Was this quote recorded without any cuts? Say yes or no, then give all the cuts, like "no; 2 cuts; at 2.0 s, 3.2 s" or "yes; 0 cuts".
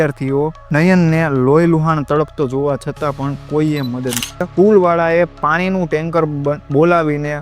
no; 1 cut; at 4.5 s